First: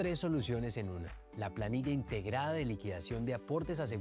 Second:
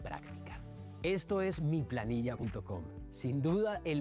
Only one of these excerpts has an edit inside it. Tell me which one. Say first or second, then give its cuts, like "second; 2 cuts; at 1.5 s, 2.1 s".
second; 1 cut; at 2.1 s